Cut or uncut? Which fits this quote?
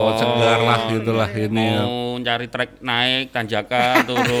uncut